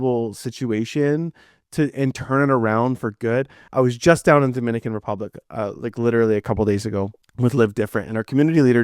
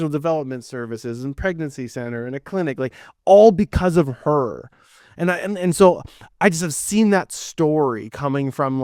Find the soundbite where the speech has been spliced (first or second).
first